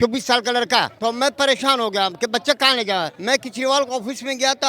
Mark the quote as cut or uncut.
cut